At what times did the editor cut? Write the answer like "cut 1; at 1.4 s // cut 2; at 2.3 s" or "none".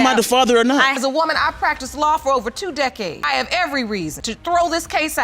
cut 1; at 0.9 s // cut 2; at 3.2 s // cut 3; at 4.3 s